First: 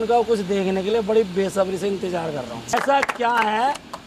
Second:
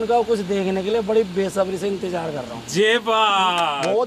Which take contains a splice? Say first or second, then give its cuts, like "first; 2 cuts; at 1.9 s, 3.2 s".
first; 1 cut; at 2.7 s